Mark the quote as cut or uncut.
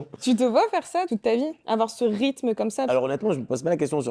cut